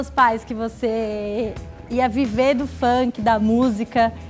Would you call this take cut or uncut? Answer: uncut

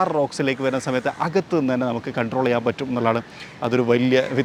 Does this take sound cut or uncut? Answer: uncut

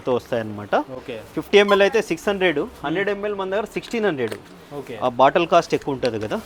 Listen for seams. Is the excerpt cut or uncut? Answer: uncut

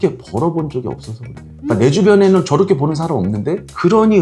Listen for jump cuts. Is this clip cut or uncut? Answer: uncut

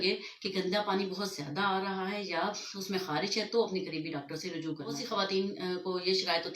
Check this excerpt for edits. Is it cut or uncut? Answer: cut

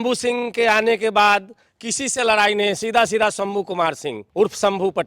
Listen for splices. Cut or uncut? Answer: cut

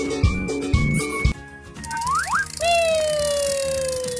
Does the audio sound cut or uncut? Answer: cut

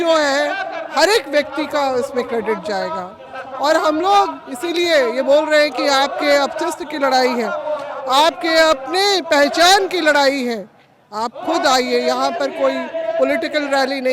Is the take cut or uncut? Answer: uncut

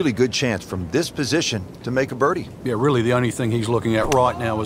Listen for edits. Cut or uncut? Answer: uncut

